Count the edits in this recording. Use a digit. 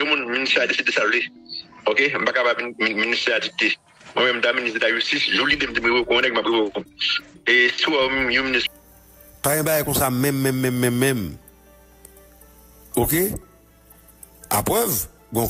1